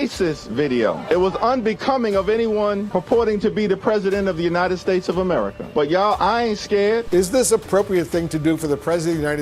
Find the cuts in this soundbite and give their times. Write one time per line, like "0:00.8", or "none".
0:07.0